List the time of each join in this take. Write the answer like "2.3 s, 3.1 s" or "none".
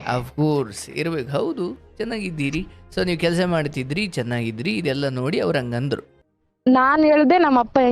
6.2 s